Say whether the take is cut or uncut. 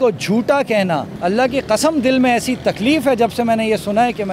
cut